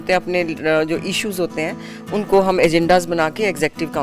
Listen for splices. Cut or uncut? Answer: uncut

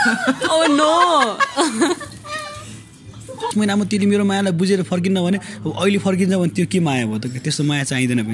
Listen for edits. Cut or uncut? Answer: cut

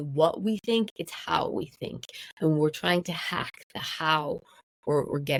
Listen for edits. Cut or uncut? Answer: uncut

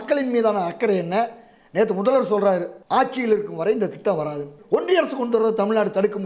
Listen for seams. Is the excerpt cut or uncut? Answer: cut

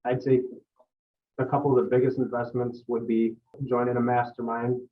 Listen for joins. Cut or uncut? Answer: cut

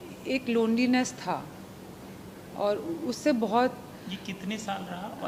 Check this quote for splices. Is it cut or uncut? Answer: uncut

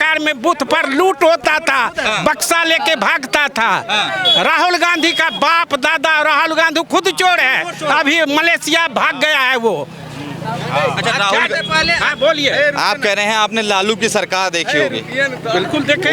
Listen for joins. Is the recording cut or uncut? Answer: uncut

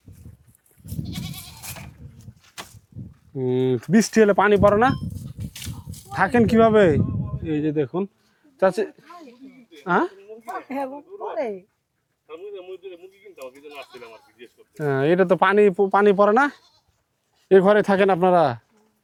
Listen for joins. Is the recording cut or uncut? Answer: uncut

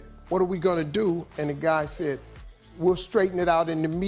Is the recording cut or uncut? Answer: uncut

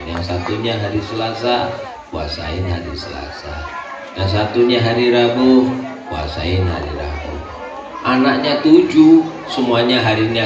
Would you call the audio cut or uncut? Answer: uncut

